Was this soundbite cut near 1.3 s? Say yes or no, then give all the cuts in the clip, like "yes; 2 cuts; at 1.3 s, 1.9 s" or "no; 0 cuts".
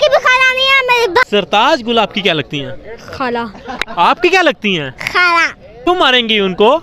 yes; 2 cuts; at 1.3 s, 5.9 s